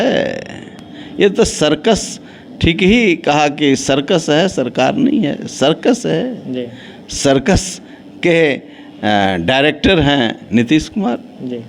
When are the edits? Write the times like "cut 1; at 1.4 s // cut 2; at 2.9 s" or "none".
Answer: none